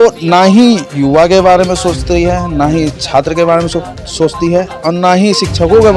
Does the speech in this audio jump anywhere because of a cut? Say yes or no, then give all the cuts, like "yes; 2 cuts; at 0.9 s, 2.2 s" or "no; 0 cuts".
no; 0 cuts